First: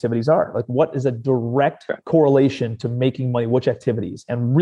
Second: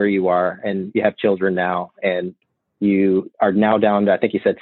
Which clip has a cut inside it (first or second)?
first